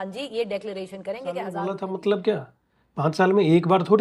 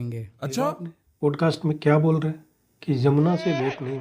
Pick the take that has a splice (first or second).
first